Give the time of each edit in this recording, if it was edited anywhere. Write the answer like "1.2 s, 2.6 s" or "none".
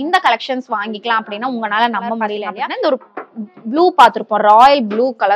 2.4 s